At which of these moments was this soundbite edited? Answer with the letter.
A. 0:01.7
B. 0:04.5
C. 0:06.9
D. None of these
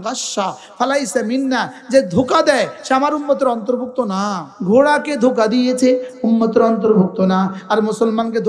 B